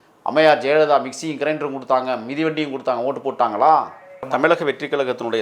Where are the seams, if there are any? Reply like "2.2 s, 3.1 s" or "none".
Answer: 4.2 s

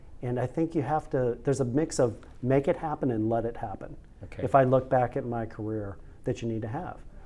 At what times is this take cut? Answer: none

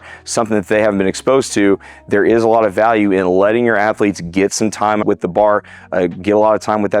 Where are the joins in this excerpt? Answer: 5.0 s

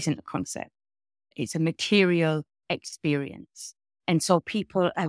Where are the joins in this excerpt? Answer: 1.3 s

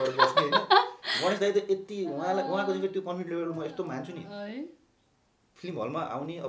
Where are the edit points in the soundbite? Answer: none

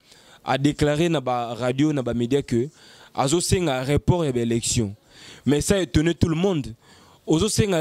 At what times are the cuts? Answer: none

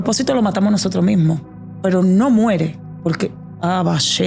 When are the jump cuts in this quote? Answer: none

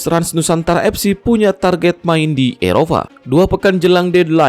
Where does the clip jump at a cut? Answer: 3.2 s

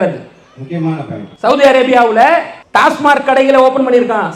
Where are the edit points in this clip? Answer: 1.2 s, 2.6 s

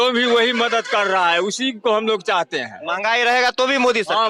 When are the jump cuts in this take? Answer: none

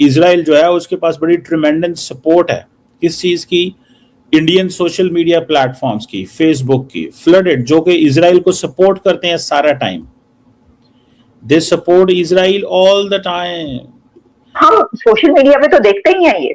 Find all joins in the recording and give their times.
14.6 s

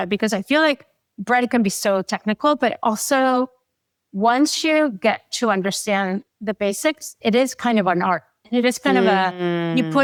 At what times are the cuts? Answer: none

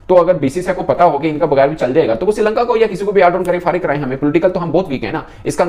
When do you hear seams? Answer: none

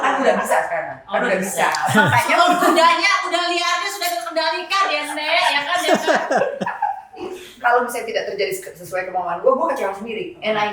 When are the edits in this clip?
7.4 s

